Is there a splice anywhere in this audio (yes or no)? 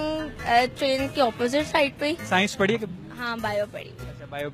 yes